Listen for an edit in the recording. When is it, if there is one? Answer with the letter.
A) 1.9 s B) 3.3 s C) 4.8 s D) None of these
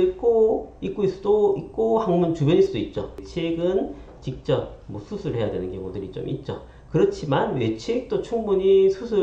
B